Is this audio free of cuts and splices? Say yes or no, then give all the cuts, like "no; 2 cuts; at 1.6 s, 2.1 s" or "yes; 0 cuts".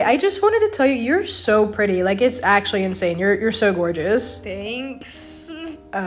yes; 0 cuts